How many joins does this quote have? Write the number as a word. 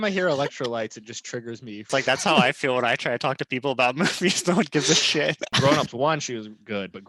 two